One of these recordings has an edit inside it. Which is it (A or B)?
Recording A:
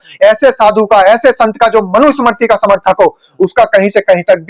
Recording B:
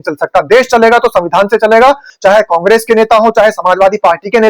B